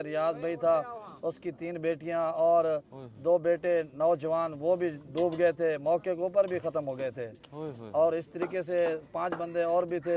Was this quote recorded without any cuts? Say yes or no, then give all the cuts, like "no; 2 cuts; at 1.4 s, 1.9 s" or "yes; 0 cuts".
yes; 0 cuts